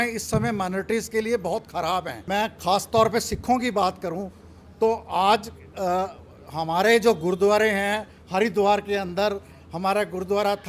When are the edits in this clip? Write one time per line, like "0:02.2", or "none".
0:02.2